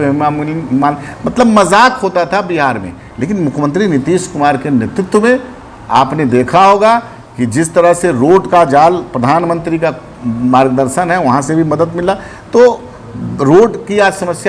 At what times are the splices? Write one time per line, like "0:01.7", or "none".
none